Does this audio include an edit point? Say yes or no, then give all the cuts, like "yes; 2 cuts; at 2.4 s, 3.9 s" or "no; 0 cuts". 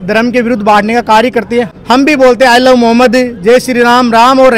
yes; 1 cut; at 1.7 s